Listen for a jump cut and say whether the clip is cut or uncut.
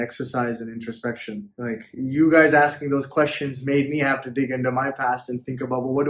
uncut